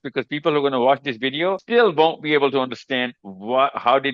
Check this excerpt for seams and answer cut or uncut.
cut